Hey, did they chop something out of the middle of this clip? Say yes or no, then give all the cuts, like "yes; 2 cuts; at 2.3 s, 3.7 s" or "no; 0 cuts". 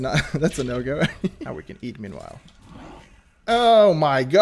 yes; 1 cut; at 1.3 s